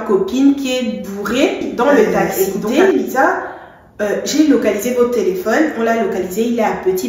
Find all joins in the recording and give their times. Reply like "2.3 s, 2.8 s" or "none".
2.3 s